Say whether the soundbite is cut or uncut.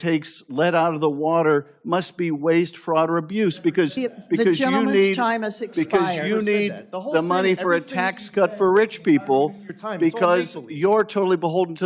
uncut